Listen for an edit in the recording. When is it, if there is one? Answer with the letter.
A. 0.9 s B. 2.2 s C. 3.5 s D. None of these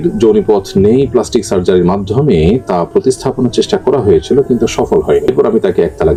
D